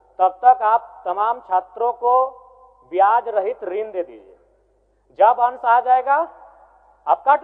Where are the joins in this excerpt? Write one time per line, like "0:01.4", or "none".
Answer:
none